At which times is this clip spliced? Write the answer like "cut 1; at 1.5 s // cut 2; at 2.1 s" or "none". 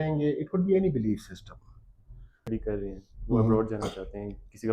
cut 1; at 2.5 s